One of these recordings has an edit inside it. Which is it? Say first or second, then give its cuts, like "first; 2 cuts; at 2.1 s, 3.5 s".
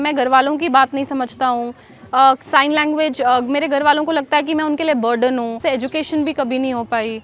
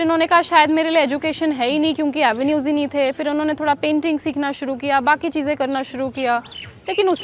first; 1 cut; at 5.6 s